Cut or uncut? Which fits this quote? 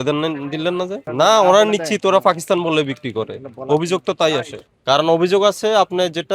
cut